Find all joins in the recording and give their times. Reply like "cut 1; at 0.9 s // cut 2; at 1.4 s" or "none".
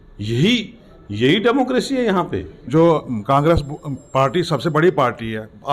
cut 1; at 2.7 s